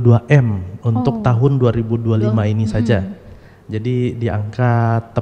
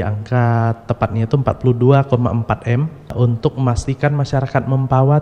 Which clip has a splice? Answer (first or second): second